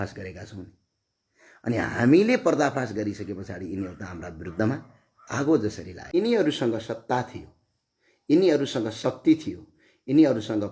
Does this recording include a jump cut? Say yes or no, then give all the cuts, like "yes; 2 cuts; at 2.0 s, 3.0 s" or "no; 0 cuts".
yes; 1 cut; at 5.9 s